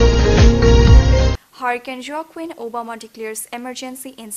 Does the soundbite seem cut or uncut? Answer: uncut